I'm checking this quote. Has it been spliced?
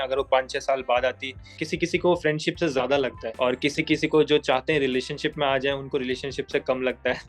yes; 2 cuts; at 1.5 s, 3.2 s

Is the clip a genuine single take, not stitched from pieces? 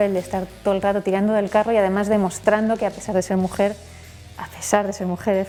yes; 0 cuts

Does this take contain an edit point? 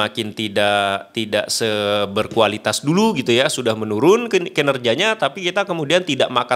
no; 0 cuts

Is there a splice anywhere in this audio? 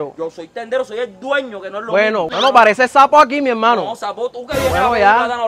no; 0 cuts

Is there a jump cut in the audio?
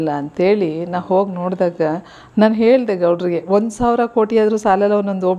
no; 0 cuts

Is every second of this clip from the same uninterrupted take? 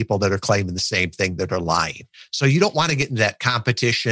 yes; 0 cuts

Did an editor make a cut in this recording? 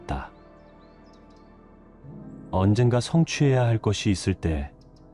no; 0 cuts

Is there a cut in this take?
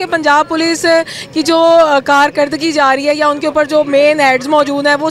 no; 0 cuts

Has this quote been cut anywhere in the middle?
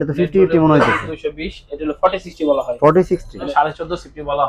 yes; 1 cut; at 3.5 s

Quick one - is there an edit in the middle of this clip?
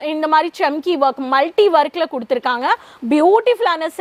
no; 0 cuts

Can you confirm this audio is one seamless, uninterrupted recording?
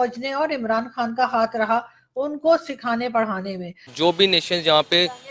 no; 1 cut; at 3.8 s

